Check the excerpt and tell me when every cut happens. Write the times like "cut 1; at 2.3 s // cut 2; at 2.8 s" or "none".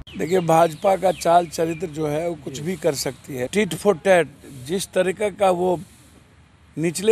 cut 1; at 3.5 s